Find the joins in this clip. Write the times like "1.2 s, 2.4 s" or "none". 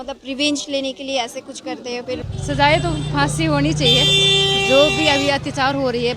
2.3 s